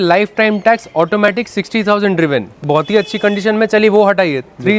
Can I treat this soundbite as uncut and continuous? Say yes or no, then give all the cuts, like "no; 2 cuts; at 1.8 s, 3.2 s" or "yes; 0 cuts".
no; 1 cut; at 2.6 s